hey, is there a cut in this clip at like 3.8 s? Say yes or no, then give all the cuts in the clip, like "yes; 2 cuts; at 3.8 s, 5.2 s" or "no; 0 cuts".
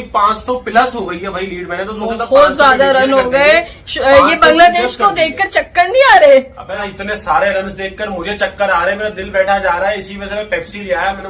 no; 1 cut; at 6.9 s